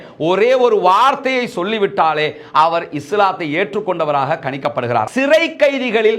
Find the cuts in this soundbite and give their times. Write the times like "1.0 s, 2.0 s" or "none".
5.1 s